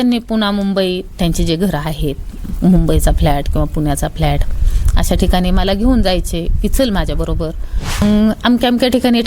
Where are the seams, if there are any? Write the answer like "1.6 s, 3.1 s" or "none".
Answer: 8.0 s